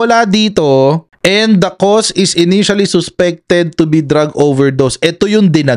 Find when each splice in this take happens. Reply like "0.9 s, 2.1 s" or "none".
none